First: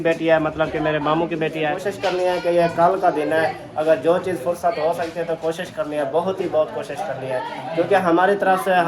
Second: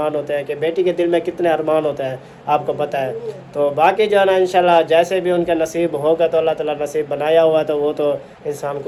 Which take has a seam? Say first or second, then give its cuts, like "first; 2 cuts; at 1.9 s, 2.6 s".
first; 1 cut; at 1.8 s